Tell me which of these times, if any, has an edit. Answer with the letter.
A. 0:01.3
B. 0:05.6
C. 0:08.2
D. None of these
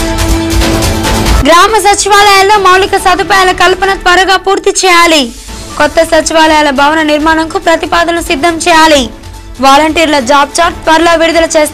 A